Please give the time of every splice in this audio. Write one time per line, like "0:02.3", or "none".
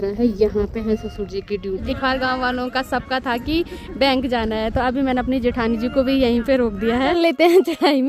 0:01.8
0:07.1